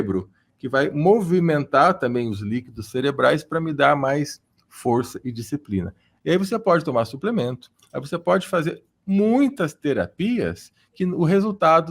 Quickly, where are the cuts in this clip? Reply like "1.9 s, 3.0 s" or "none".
6.0 s